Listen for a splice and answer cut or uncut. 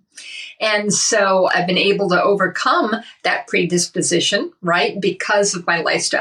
cut